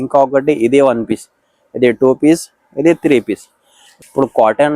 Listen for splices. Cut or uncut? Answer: cut